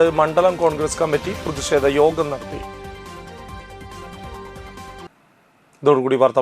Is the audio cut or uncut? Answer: uncut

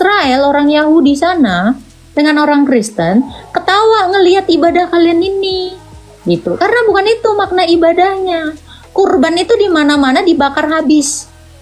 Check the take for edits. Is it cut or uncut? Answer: uncut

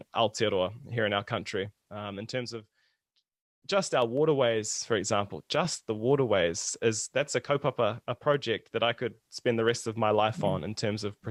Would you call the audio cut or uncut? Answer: uncut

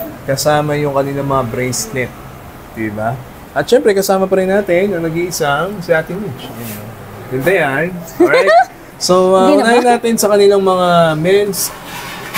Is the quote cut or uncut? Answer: uncut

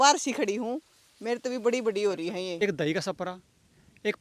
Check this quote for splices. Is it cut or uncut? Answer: cut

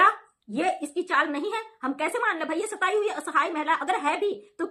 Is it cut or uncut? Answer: uncut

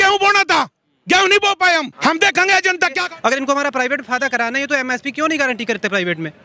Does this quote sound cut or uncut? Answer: cut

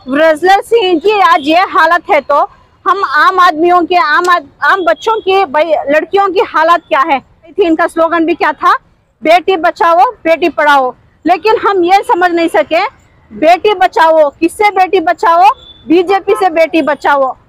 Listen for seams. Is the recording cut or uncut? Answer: cut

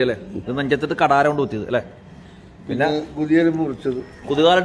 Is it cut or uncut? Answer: uncut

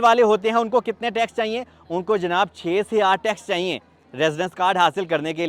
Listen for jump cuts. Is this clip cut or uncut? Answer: uncut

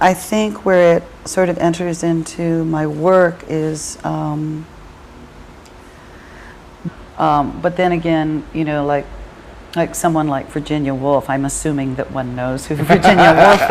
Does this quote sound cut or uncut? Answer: uncut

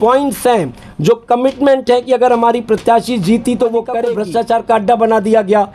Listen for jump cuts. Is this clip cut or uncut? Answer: cut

